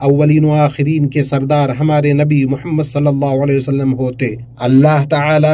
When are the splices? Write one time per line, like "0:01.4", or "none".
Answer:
0:04.5